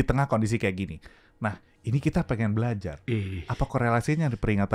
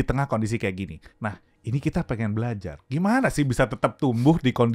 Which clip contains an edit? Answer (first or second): second